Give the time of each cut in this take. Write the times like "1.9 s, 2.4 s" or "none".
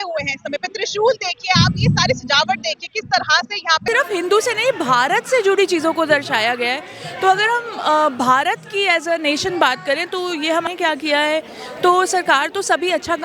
3.8 s, 10.7 s